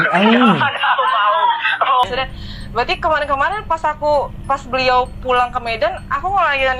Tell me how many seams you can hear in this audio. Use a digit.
1